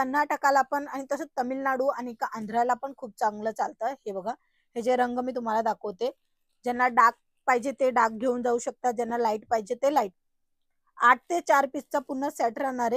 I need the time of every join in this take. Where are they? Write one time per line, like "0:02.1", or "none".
none